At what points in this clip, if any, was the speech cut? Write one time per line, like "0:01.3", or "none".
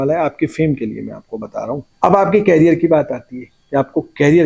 0:01.9